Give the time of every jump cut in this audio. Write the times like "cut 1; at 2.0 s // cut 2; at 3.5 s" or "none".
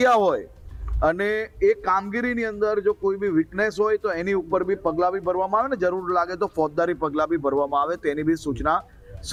none